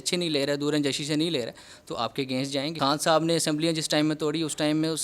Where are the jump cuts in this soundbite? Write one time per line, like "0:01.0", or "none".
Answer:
0:02.8

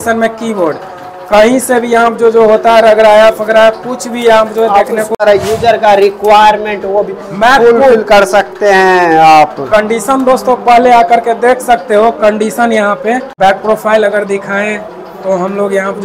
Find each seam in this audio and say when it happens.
0:05.1
0:13.3

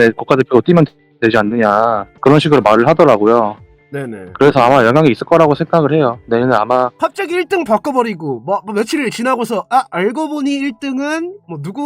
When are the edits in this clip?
0:02.1
0:06.9

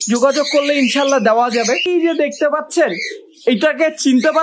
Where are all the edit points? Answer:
0:01.8

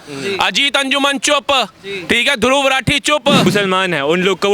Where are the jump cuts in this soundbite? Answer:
0:03.5

